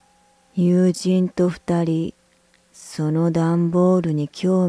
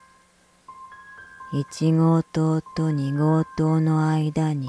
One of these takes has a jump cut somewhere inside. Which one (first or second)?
first